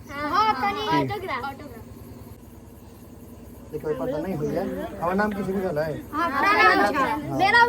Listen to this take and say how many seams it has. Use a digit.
1